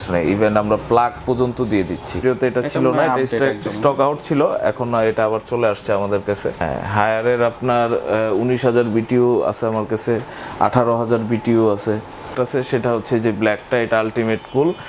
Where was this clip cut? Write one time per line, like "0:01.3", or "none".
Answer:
0:02.2
0:06.6
0:12.3